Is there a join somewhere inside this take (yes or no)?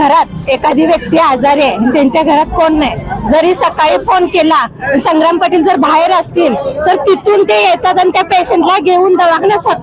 no